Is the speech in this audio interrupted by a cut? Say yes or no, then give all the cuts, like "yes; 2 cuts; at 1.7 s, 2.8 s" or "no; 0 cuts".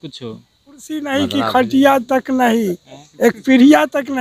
yes; 1 cut; at 1.2 s